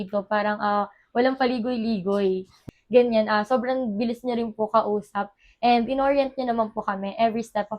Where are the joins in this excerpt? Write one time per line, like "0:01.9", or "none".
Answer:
0:02.6